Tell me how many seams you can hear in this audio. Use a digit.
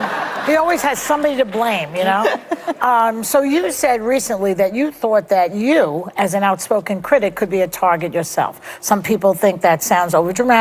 0